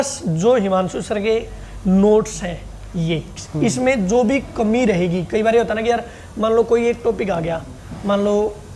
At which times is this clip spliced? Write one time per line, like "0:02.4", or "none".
none

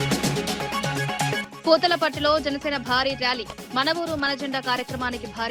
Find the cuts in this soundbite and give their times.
0:01.4

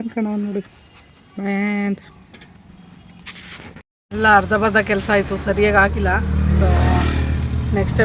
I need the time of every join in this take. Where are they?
0:04.0

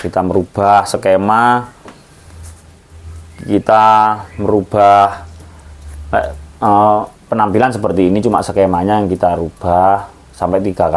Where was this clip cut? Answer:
none

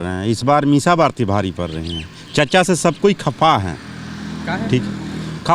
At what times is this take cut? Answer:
none

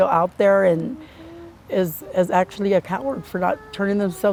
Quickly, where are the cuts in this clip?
none

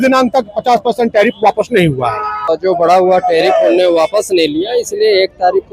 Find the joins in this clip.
0:02.5

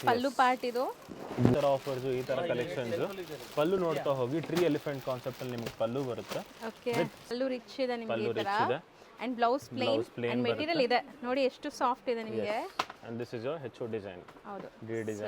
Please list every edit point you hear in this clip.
0:01.5
0:07.3

